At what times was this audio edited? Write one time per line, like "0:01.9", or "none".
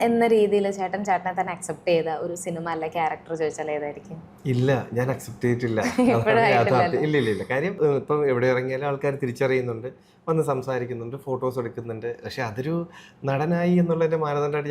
0:07.7